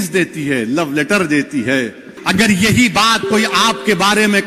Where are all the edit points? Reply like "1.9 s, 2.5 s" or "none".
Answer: 2.2 s